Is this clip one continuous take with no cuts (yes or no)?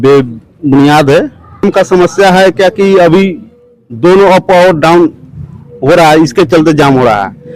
no